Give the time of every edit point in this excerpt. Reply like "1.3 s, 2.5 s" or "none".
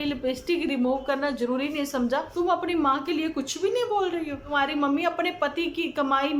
2.3 s, 4.5 s